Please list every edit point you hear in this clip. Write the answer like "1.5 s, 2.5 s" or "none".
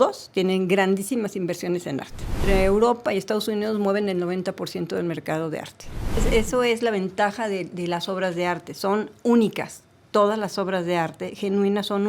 2.4 s, 5.8 s